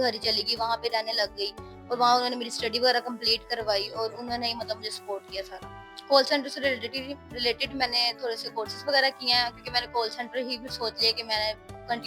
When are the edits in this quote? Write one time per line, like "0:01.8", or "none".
0:05.9